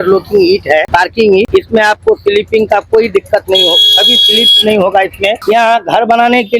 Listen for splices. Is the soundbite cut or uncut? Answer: cut